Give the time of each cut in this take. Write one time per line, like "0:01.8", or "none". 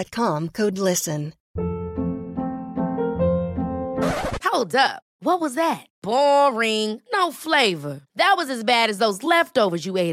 0:01.4